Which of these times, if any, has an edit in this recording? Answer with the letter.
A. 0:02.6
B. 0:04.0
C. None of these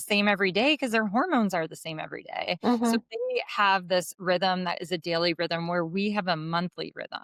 C